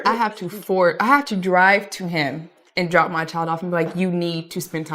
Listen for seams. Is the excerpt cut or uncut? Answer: uncut